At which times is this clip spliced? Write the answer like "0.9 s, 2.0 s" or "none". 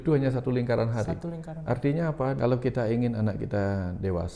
2.4 s